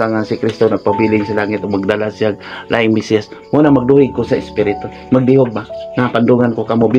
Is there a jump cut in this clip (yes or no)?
no